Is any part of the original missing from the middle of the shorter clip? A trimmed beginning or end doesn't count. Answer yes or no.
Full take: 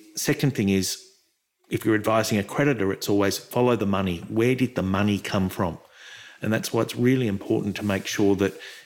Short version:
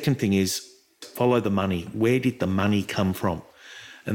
yes